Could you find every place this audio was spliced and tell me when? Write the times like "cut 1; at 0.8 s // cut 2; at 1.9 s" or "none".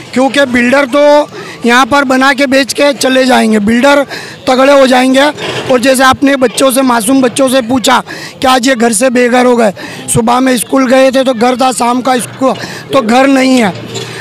none